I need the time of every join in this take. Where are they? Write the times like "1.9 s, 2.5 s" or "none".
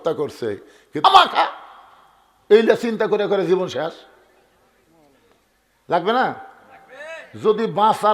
1.0 s